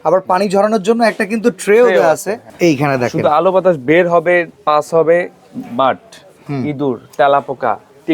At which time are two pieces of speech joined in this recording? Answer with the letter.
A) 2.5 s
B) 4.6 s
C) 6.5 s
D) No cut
A